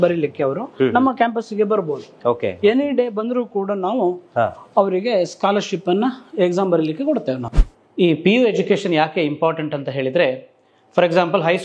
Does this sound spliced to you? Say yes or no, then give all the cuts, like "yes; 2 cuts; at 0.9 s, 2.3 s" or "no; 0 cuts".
no; 0 cuts